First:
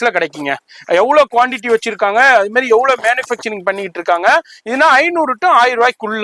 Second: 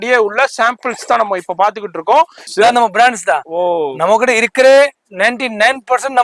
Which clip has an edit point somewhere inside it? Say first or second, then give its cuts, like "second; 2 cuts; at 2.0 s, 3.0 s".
second; 1 cut; at 2.4 s